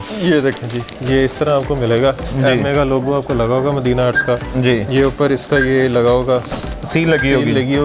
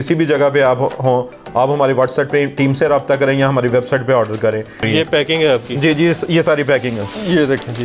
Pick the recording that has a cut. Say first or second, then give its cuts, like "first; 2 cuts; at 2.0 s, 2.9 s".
second; 1 cut; at 4.8 s